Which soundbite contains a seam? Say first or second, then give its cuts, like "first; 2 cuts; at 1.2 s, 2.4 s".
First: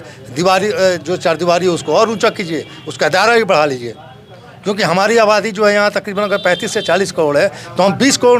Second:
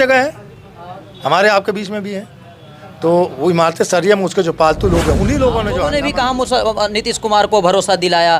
second; 1 cut; at 5.9 s